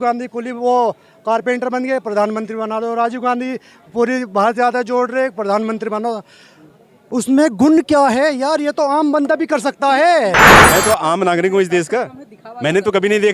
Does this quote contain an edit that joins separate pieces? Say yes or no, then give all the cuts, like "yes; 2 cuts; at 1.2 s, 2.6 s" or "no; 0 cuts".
yes; 1 cut; at 10.5 s